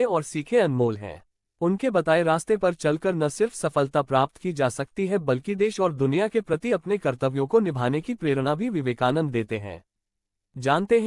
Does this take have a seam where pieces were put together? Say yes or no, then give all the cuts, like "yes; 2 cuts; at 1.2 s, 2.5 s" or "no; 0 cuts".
no; 0 cuts